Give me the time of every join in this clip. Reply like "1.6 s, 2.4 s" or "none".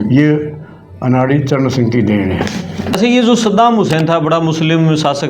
2.9 s